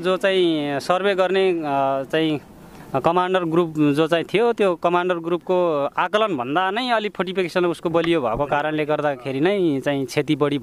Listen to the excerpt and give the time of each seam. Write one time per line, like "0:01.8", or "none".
none